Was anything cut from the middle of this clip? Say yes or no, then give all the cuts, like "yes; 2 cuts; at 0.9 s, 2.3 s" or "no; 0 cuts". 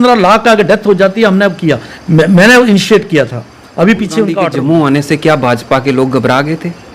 yes; 1 cut; at 4.5 s